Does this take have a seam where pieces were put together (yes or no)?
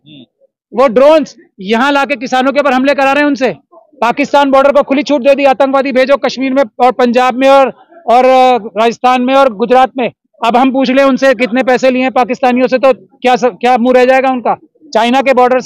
no